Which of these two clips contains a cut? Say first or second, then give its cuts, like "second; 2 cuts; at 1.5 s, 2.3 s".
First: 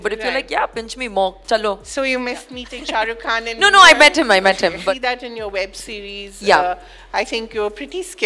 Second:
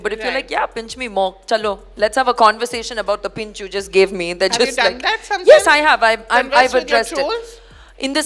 first; 2 cuts; at 1.8 s, 4.8 s